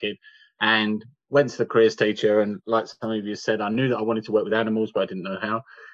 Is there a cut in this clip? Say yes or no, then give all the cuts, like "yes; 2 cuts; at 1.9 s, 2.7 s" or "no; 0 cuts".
no; 0 cuts